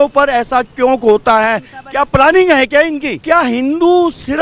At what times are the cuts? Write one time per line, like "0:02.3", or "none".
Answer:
0:03.1